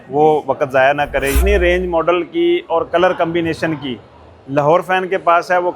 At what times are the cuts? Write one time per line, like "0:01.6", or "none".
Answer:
0:01.3